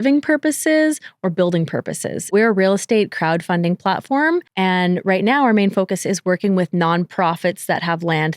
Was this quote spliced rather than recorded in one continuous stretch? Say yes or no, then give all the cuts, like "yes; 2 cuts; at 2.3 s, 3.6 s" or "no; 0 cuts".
yes; 2 cuts; at 2.3 s, 4.5 s